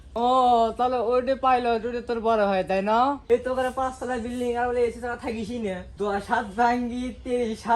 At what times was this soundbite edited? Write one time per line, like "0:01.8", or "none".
0:03.2
0:05.9